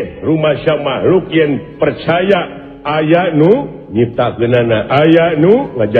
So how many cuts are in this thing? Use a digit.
0